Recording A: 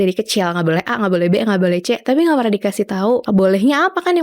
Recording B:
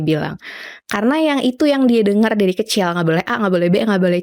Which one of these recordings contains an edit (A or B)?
A